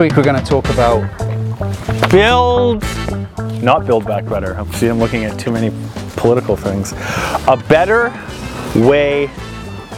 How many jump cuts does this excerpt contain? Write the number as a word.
zero